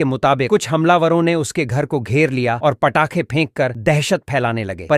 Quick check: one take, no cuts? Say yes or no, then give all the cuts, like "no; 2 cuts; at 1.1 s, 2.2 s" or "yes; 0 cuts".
yes; 0 cuts